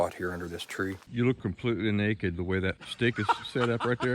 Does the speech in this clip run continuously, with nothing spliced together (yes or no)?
no